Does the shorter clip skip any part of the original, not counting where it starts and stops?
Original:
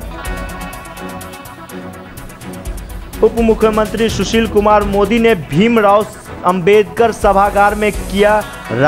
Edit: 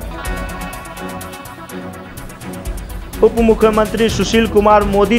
no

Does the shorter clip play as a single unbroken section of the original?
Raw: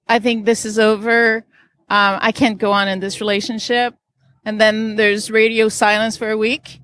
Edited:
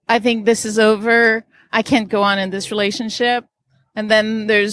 no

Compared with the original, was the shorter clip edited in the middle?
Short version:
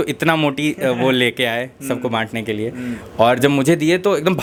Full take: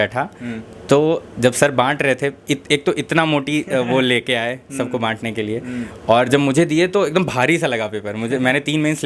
no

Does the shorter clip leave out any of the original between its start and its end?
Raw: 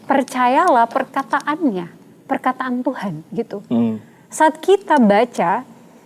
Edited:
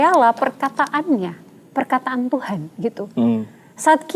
no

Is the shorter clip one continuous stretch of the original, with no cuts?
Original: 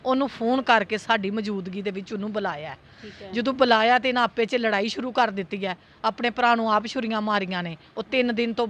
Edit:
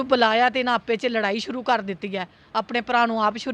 yes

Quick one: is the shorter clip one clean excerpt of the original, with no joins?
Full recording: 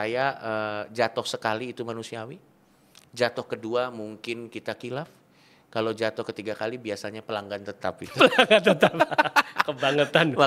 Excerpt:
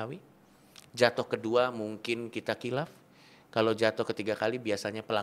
yes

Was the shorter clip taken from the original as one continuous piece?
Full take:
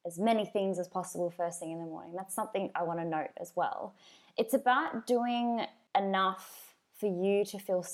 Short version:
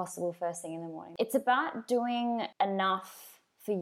no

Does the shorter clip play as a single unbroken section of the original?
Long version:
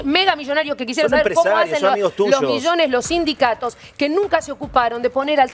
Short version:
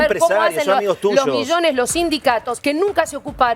no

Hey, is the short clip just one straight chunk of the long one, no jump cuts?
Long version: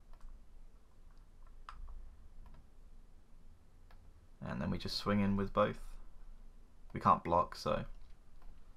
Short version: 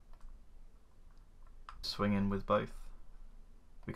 no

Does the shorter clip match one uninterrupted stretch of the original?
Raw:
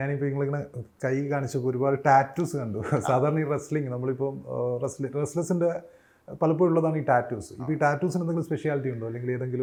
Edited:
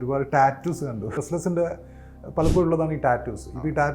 no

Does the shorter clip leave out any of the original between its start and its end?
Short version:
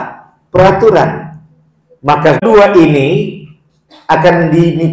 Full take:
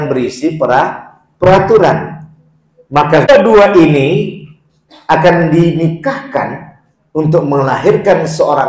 yes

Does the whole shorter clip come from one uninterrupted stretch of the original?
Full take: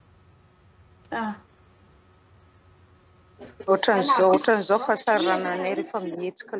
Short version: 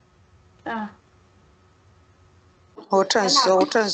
no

